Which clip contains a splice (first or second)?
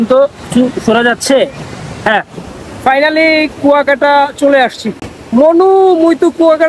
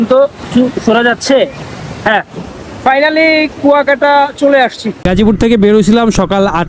second